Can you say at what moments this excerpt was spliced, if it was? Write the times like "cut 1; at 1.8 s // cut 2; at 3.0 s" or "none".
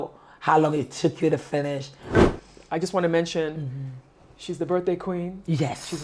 cut 1; at 2.2 s